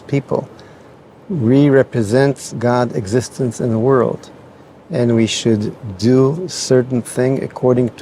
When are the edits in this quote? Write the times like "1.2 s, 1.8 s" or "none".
none